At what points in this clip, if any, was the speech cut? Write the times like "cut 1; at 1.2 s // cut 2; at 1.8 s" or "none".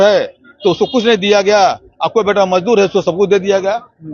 none